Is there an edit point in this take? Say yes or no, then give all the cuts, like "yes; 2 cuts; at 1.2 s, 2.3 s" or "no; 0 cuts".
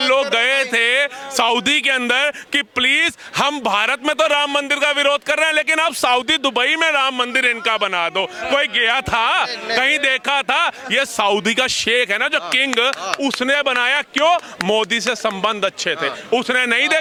no; 0 cuts